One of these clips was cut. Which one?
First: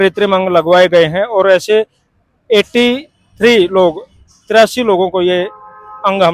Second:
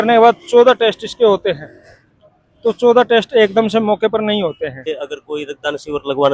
second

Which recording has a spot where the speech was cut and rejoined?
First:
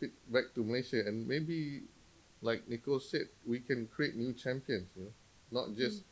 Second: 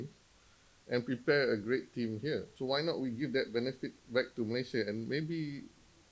second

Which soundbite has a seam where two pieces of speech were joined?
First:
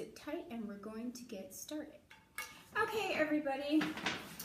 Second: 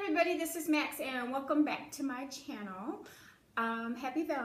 first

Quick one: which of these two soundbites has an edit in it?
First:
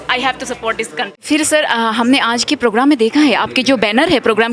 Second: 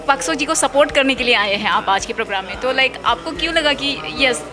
first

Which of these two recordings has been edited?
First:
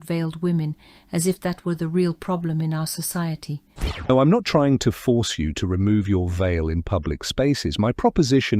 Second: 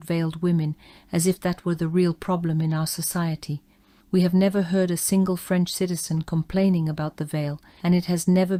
first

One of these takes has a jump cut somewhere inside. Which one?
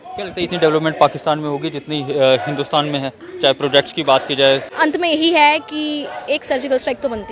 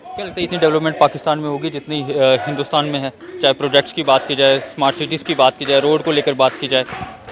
first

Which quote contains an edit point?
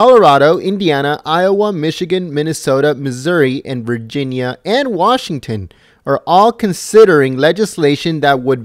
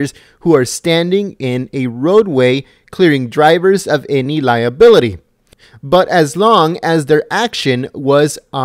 second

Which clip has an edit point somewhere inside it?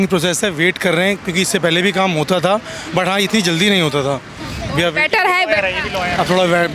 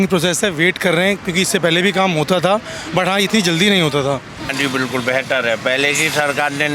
second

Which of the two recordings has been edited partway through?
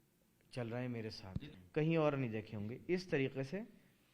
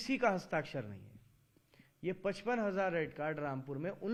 first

